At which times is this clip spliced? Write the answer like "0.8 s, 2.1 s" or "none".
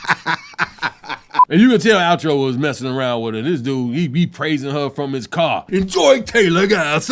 1.4 s